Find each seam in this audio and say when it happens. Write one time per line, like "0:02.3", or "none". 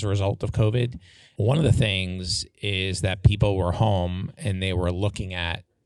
none